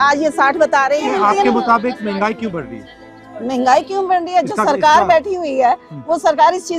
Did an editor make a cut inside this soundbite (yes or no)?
no